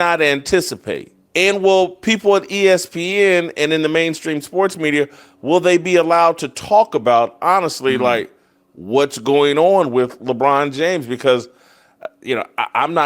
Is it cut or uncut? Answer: cut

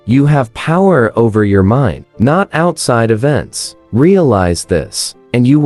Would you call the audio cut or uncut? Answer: uncut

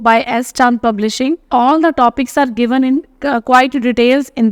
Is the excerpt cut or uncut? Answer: cut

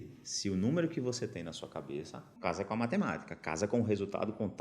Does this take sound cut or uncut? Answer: cut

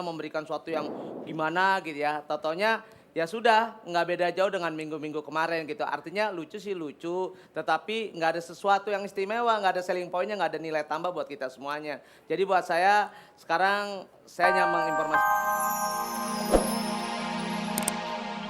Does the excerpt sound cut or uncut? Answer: cut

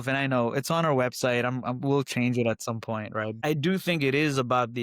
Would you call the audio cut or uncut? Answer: cut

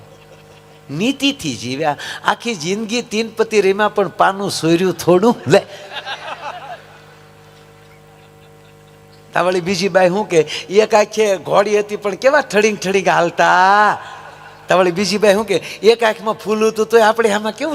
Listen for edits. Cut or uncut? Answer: uncut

